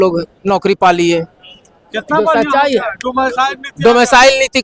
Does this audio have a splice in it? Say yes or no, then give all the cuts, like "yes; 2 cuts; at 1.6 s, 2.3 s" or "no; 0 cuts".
no; 0 cuts